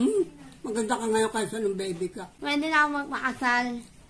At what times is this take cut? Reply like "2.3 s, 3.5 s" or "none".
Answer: 2.3 s